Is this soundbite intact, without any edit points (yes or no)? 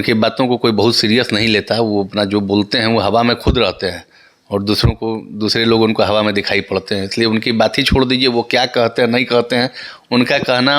yes